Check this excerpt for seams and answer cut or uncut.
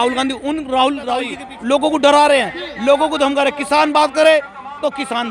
cut